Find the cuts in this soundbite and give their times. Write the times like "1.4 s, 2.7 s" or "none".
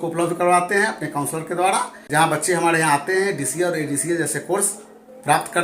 2.0 s